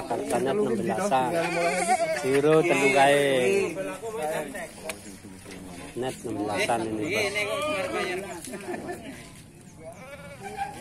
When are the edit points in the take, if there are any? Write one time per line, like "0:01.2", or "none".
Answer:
none